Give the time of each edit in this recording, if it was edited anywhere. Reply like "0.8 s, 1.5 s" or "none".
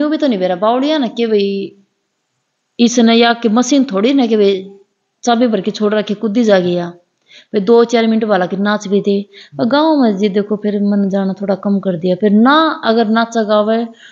none